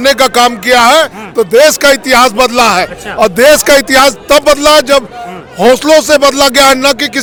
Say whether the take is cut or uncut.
uncut